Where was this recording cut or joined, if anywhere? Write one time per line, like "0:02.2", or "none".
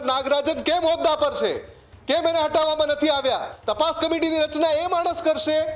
0:03.5